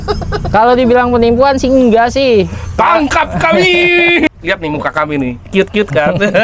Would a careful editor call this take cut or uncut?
cut